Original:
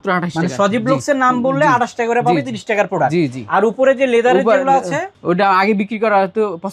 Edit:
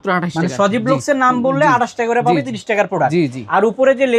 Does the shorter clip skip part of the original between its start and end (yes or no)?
no